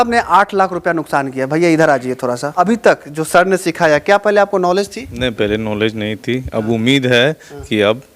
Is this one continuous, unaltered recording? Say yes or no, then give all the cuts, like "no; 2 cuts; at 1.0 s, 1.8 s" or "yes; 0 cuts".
no; 1 cut; at 2.5 s